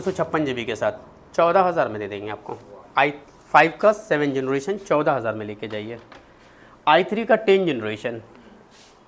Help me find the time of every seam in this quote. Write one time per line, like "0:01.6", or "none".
none